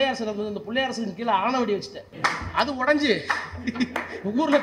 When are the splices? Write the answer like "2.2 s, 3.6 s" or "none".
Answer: 2.0 s